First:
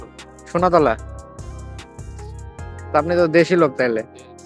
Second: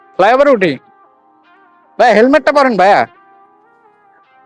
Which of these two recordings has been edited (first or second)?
second